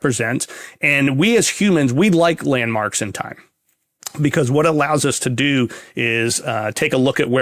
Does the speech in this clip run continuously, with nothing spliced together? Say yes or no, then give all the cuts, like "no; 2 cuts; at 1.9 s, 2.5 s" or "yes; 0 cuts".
yes; 0 cuts